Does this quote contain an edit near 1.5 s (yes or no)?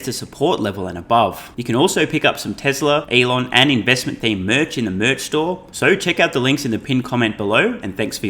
yes